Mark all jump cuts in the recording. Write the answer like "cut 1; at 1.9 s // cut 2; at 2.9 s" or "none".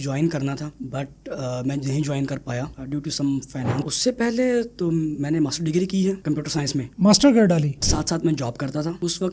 cut 1; at 3.7 s // cut 2; at 7.8 s

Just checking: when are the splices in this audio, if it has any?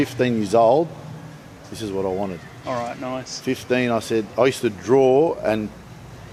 none

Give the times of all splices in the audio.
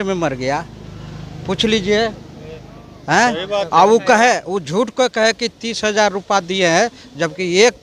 none

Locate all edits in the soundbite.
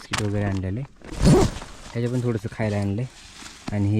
cut 1; at 1.0 s

